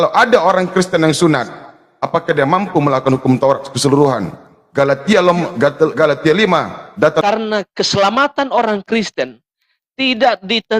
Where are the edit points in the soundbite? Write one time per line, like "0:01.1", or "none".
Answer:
0:07.2